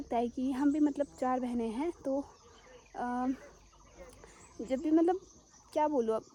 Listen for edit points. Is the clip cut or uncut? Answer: uncut